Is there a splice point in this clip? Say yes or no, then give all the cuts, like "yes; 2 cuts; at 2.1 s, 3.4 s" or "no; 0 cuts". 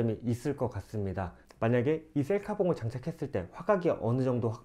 yes; 1 cut; at 1.4 s